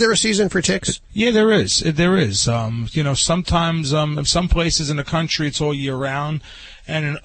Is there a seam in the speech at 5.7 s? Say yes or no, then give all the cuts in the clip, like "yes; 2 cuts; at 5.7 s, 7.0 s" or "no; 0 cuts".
no; 1 cut; at 0.9 s